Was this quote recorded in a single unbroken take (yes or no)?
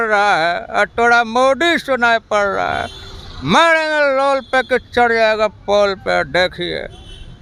yes